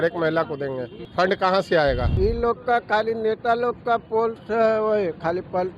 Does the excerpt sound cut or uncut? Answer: cut